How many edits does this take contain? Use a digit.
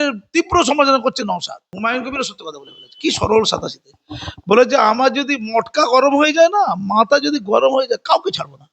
1